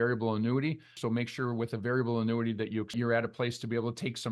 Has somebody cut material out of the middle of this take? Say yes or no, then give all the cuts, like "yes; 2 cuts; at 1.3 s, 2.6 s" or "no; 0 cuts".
yes; 2 cuts; at 1.0 s, 2.9 s